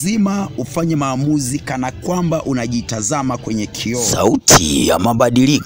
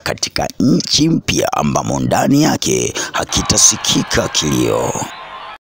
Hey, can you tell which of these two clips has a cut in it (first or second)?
first